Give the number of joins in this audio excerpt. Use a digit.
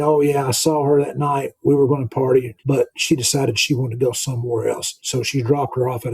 1